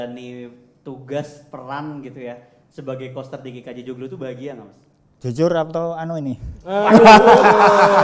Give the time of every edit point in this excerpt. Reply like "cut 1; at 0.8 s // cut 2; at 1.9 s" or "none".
none